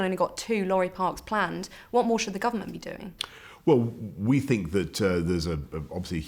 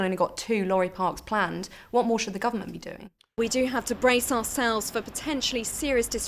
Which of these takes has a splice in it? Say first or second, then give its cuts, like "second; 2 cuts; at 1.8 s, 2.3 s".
second; 1 cut; at 3.4 s